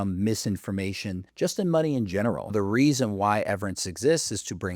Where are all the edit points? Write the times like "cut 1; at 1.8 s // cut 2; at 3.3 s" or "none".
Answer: cut 1; at 1.2 s // cut 2; at 2.5 s